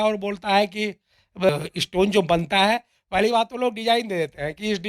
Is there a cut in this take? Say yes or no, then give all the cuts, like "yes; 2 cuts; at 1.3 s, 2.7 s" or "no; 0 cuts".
yes; 1 cut; at 1.5 s